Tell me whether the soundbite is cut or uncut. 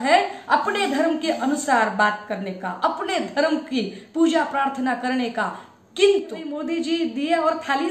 cut